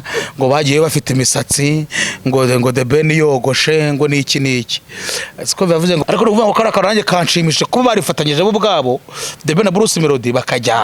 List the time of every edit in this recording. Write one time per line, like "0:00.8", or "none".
0:06.0